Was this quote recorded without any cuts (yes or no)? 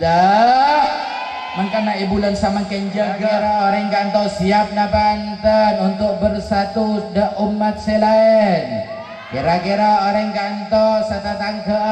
no